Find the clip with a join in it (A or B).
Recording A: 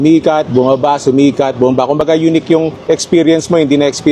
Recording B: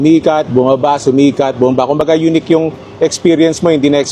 A